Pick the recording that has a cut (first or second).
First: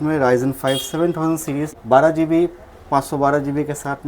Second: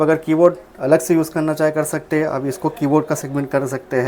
first